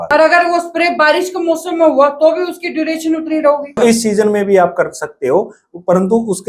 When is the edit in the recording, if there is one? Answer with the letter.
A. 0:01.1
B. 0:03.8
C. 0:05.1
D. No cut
B